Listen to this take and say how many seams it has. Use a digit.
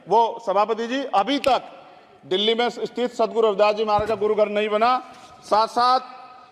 0